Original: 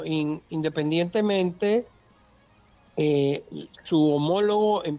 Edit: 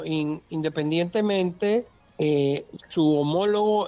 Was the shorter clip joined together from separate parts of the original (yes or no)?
yes